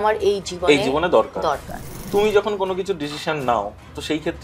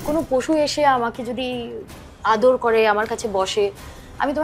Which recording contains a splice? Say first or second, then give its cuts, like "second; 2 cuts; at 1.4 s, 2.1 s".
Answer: first; 1 cut; at 2.0 s